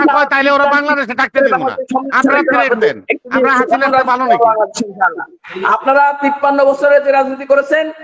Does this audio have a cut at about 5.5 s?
no; 0 cuts

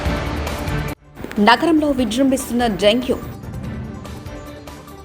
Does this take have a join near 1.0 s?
yes; 1 cut; at 1.0 s

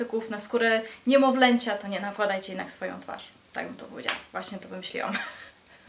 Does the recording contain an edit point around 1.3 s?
no; 0 cuts

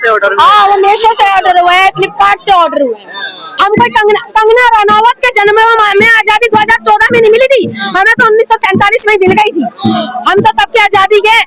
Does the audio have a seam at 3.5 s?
yes; 1 cut; at 3.5 s

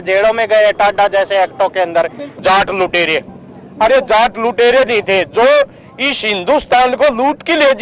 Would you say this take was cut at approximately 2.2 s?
yes; 1 cut; at 2.2 s

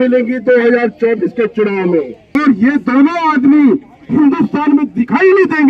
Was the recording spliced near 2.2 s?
yes; 1 cut; at 2.2 s

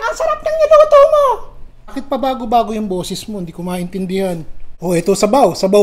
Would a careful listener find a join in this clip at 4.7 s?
yes; 1 cut; at 4.7 s

